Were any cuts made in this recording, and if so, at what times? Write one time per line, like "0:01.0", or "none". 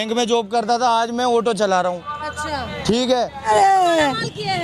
0:03.5